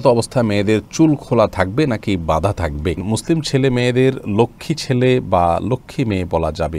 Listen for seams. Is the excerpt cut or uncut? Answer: cut